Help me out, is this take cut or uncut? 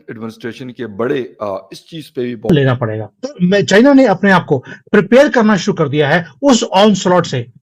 cut